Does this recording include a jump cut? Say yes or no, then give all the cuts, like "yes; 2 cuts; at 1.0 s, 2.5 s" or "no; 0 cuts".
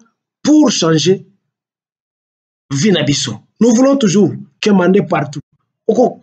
no; 0 cuts